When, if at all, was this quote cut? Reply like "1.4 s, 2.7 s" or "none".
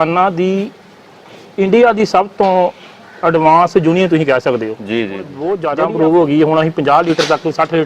5.4 s